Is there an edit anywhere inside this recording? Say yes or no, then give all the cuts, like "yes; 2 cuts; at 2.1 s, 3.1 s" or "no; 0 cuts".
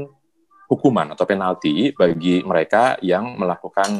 no; 0 cuts